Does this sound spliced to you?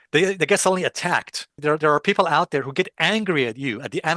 yes; 1 cut; at 1.5 s

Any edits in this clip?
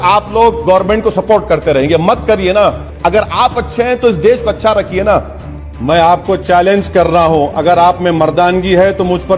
yes; 2 cuts; at 2.9 s, 5.7 s

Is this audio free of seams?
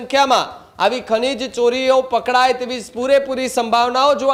yes; 0 cuts

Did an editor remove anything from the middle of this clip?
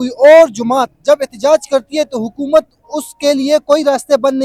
no; 0 cuts

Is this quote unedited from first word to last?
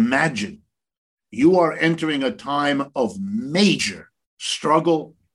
no; 1 cut; at 1.0 s

